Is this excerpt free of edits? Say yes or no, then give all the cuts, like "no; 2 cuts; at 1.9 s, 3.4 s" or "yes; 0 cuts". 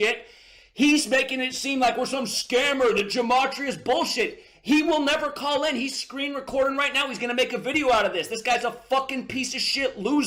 yes; 0 cuts